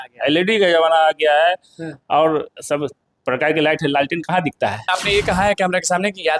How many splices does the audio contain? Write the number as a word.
one